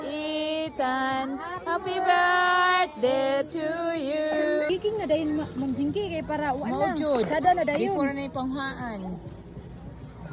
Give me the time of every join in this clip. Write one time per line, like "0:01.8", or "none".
0:04.7